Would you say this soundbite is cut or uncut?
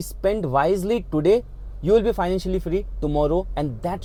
uncut